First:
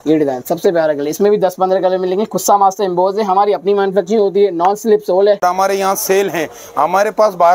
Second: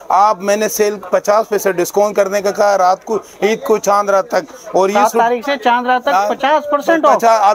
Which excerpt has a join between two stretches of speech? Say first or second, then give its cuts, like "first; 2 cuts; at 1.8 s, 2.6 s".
first; 1 cut; at 5.4 s